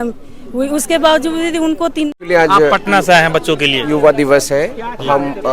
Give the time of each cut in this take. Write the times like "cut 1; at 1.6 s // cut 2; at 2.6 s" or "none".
cut 1; at 2.2 s